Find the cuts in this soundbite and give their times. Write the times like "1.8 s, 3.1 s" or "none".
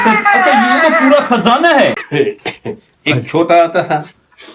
2.0 s